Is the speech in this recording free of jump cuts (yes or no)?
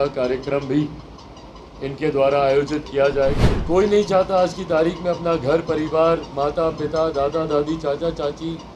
no